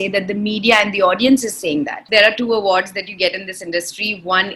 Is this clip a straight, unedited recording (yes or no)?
no